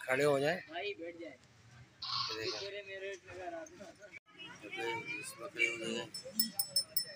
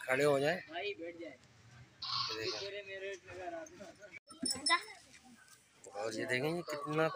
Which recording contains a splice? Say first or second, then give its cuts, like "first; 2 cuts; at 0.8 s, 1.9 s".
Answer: second; 1 cut; at 4.3 s